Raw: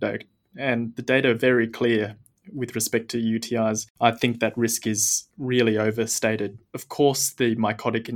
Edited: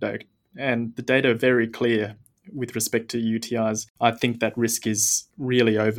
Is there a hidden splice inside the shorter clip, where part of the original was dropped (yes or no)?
no